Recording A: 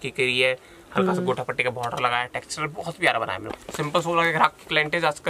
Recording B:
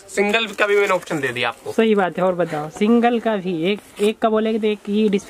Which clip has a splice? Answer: A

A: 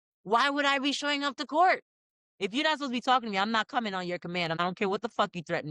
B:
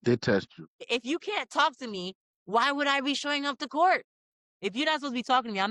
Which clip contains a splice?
A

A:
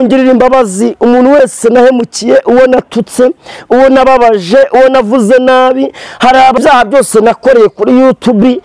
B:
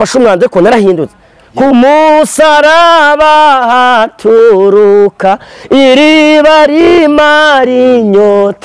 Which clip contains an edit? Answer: A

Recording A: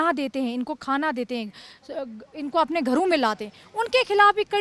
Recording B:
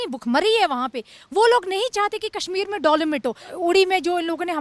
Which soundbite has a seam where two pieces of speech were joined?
B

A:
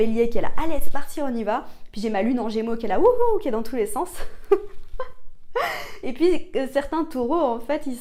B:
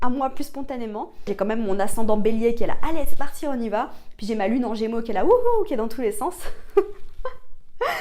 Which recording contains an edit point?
B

